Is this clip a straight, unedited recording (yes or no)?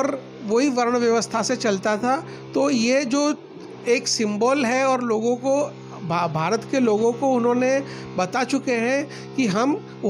yes